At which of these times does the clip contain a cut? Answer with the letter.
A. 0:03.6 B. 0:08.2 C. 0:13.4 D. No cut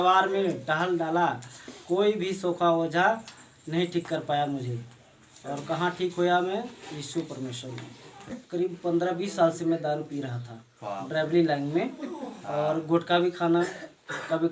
B